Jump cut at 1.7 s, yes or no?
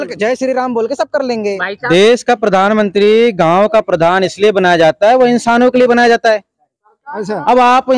yes